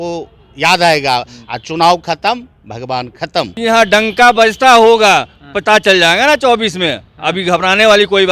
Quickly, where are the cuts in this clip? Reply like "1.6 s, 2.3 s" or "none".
3.5 s